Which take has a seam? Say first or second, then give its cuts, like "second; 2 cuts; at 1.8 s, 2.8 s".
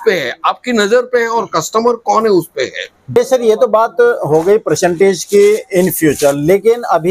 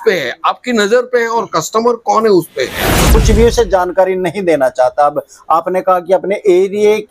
second; 1 cut; at 3.0 s